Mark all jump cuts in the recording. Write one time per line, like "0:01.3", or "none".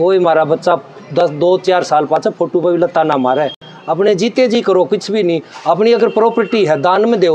none